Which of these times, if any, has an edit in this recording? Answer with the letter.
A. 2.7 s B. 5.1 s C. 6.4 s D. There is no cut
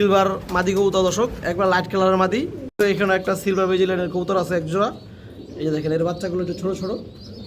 A